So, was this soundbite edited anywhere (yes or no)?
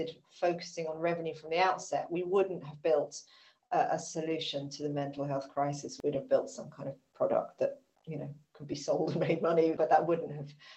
yes